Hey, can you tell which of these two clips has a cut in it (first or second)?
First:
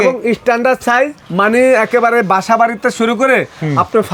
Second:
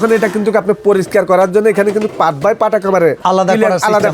second